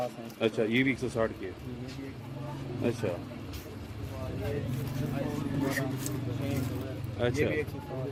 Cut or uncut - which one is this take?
uncut